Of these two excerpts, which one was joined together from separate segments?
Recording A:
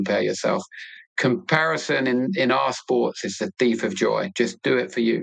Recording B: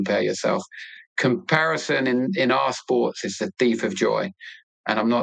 A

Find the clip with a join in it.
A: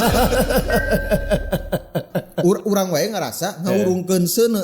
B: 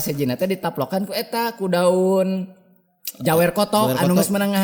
A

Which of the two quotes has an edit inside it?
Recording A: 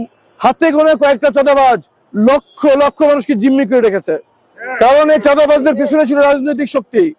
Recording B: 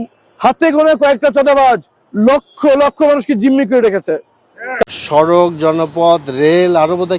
B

